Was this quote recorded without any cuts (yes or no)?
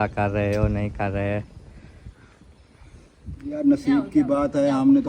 yes